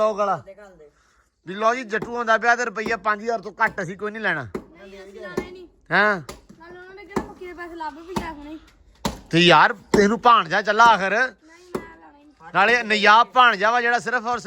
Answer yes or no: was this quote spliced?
no